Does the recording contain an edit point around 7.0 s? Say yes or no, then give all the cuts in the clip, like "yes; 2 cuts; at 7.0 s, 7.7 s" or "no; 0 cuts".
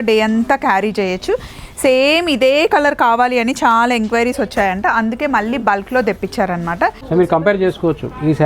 yes; 1 cut; at 7.0 s